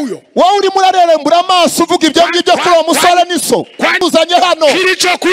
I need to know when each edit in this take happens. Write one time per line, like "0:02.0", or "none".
0:04.0